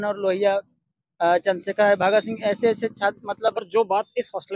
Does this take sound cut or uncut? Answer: cut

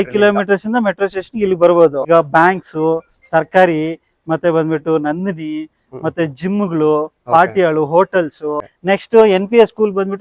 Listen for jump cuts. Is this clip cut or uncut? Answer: cut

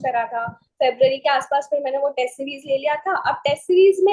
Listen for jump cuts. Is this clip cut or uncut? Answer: uncut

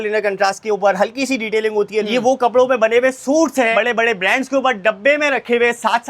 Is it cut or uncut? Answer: cut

